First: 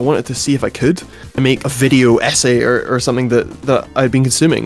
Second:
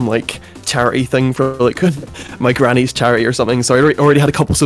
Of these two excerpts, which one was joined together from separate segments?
first; 2 cuts; at 1.3 s, 3.5 s

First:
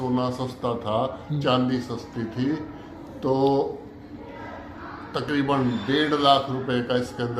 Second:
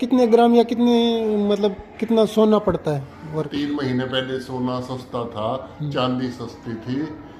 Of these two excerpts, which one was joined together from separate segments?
second; 1 cut; at 3.5 s

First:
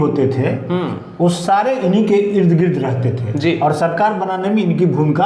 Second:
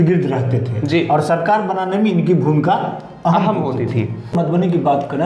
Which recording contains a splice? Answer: second; 1 cut; at 4.3 s

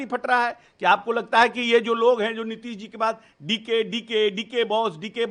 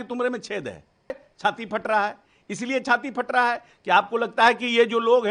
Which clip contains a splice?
second; 1 cut; at 1.3 s

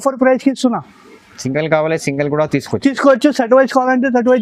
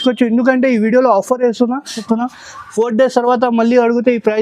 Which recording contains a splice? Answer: second; 1 cut; at 2.0 s

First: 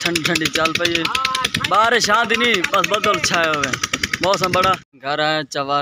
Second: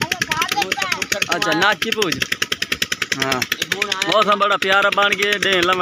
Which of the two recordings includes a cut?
first; 1 cut; at 4.9 s

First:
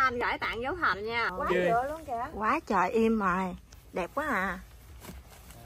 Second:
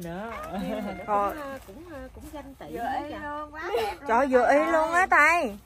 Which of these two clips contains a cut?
first; 1 cut; at 1.3 s

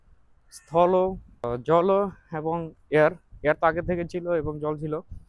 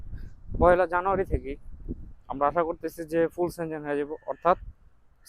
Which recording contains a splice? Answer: first; 1 cut; at 1.5 s

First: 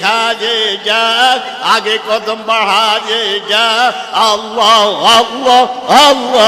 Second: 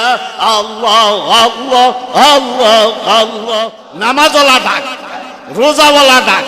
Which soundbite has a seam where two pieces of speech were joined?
second; 1 cut; at 3.7 s

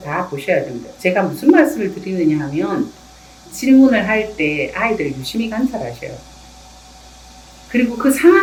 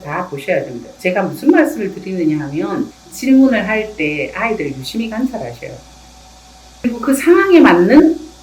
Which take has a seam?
second; 2 cuts; at 3.0 s, 6.8 s

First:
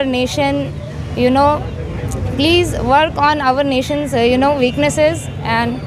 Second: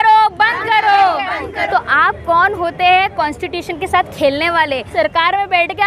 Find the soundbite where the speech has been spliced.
second; 2 cuts; at 1.6 s, 4.9 s

